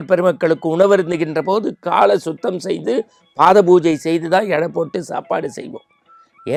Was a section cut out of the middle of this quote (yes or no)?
no